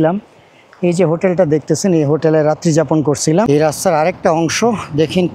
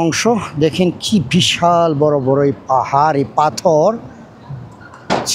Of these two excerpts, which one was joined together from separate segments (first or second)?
first